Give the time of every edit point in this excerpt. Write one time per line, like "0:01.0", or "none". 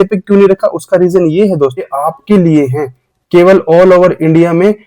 0:01.8